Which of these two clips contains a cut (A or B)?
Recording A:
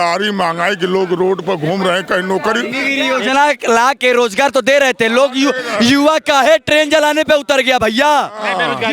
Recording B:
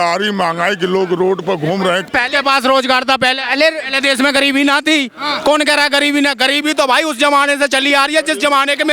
B